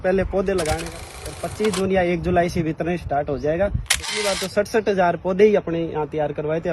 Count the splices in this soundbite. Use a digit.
2